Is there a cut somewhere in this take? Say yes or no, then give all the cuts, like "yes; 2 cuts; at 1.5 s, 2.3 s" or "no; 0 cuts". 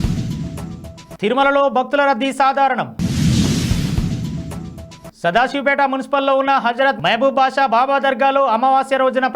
yes; 1 cut; at 1.0 s